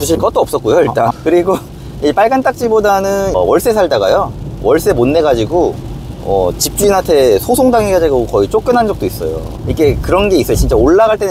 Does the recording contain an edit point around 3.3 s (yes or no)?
yes